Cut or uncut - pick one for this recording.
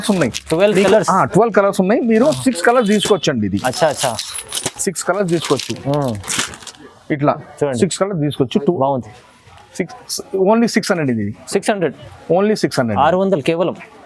uncut